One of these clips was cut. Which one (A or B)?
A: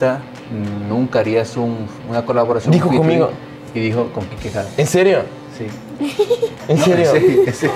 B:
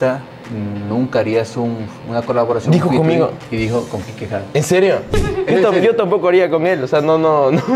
B